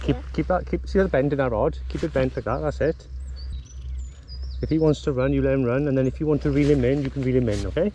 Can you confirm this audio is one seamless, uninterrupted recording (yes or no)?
no